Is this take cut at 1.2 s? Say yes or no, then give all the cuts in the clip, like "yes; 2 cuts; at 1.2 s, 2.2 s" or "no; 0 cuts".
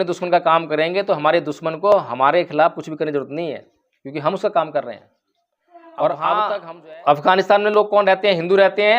no; 1 cut; at 6.5 s